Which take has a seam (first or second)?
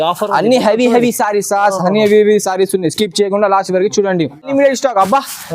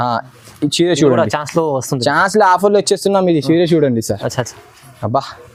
first